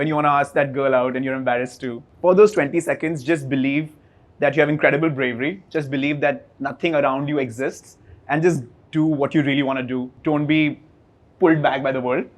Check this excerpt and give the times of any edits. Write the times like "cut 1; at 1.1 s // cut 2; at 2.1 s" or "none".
cut 1; at 2.0 s // cut 2; at 10.1 s